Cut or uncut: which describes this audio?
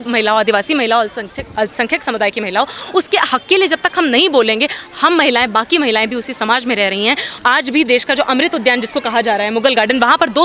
cut